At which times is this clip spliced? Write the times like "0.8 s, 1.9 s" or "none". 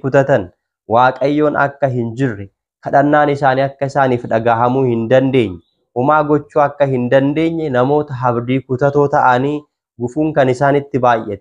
none